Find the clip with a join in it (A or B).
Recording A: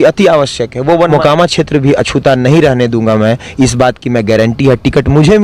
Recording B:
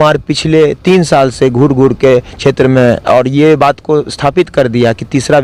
A